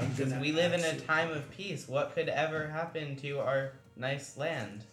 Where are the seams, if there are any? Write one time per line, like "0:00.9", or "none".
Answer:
0:03.8